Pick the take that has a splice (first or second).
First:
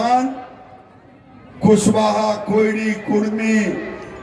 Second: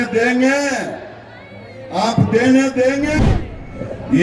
second